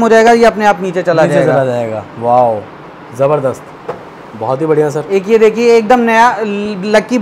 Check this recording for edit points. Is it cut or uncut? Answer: uncut